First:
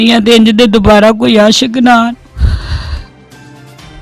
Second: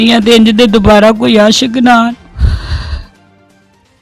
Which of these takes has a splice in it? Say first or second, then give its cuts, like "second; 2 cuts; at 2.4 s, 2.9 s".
first; 1 cut; at 3.0 s